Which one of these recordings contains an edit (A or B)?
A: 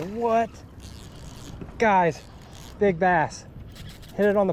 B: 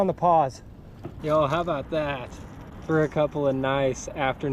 B